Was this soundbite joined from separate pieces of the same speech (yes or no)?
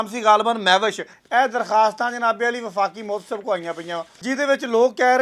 yes